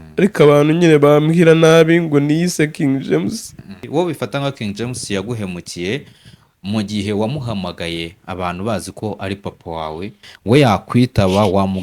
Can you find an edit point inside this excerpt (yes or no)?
yes